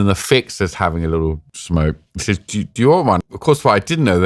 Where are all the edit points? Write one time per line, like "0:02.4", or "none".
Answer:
0:01.5
0:03.2